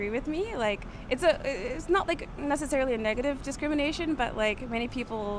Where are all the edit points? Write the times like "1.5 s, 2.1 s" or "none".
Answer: none